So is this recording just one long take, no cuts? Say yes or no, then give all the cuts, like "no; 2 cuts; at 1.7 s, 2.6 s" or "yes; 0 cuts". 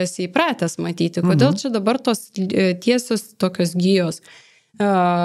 yes; 0 cuts